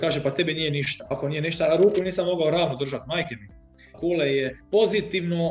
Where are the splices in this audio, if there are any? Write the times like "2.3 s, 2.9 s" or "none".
1.0 s, 3.9 s, 4.6 s